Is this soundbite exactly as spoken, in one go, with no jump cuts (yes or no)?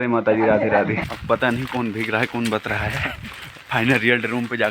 no